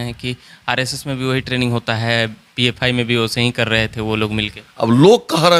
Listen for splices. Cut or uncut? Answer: uncut